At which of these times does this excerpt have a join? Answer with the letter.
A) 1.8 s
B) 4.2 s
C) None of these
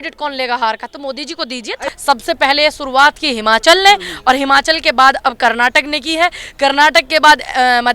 A